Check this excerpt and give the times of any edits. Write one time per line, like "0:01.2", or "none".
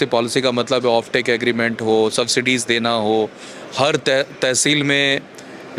none